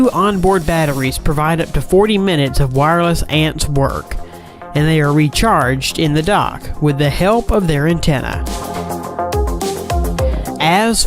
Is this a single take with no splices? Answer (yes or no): yes